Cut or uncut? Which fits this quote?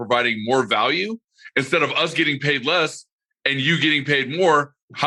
uncut